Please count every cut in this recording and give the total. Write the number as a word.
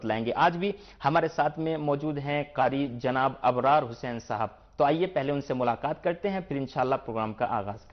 one